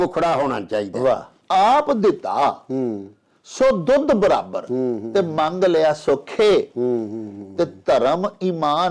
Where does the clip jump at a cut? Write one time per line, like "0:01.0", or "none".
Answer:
0:01.4